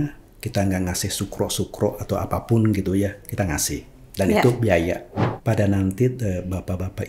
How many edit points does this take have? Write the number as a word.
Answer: one